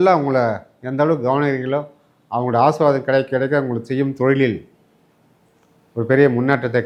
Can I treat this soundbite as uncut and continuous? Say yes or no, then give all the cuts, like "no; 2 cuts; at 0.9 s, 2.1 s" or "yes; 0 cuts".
yes; 0 cuts